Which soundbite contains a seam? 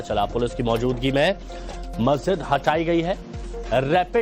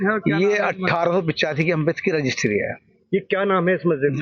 first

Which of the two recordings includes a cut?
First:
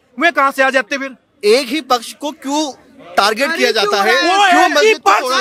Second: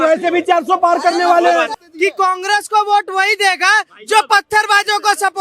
second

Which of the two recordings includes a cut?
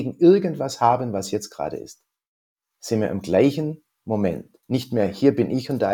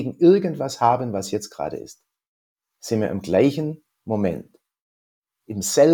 first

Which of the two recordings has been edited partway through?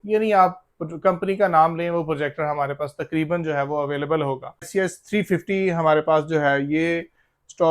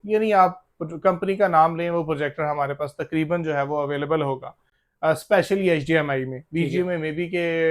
first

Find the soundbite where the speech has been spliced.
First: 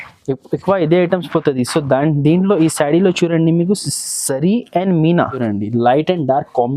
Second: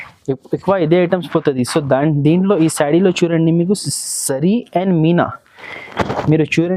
first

